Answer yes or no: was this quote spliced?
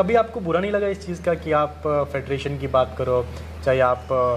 no